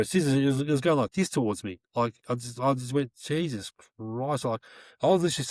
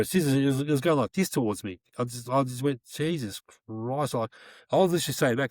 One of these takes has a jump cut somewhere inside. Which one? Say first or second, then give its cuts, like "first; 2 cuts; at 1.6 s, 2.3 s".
second; 1 cut; at 1.9 s